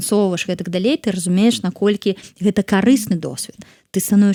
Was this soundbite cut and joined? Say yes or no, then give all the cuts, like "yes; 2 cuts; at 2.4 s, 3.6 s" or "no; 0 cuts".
no; 0 cuts